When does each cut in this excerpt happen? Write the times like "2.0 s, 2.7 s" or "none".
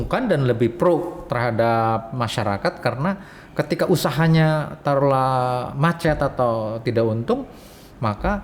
none